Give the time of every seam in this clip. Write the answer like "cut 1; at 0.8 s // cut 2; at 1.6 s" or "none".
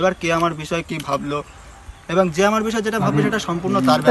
none

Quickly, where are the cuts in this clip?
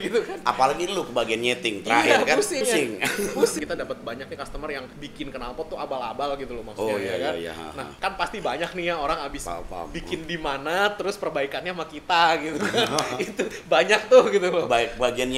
cut 1; at 2.6 s // cut 2; at 3.6 s // cut 3; at 7.9 s

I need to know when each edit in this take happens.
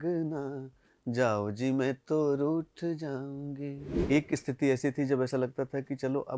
cut 1; at 3.9 s

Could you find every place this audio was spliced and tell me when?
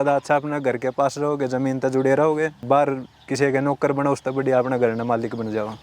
cut 1; at 2.6 s

